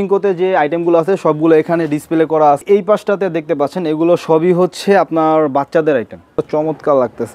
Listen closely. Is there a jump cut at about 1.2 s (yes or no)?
no